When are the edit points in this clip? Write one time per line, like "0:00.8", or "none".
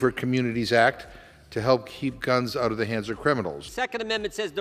0:03.6